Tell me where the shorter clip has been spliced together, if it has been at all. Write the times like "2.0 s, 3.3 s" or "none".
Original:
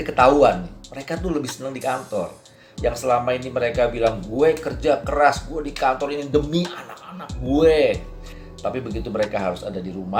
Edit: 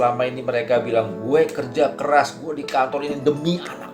none